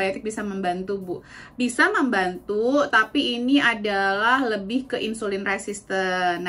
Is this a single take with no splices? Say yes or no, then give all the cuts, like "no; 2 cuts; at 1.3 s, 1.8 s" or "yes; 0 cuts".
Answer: yes; 0 cuts